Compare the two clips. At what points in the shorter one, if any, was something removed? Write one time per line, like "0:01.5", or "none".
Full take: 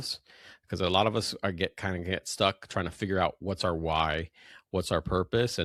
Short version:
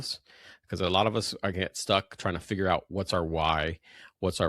0:01.5